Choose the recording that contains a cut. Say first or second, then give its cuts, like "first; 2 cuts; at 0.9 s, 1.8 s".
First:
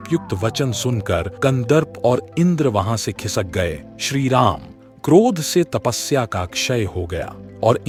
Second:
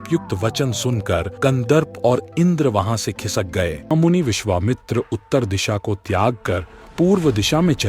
second; 1 cut; at 3.9 s